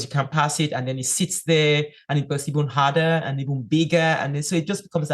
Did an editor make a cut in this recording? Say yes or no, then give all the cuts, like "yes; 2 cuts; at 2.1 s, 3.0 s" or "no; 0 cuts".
no; 0 cuts